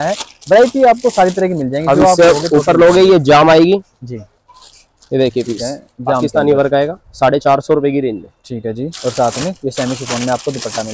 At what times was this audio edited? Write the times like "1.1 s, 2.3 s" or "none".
none